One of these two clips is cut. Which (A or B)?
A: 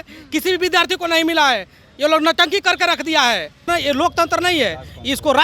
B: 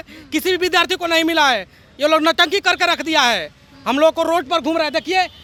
A